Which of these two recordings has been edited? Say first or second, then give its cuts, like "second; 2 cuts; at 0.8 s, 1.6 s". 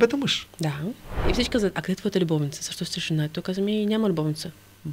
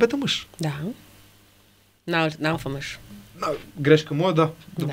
first; 1 cut; at 1.1 s